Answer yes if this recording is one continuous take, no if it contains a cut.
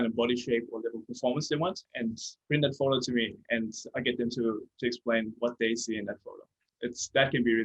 no